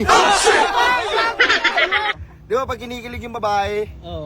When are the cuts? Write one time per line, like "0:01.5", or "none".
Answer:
0:02.2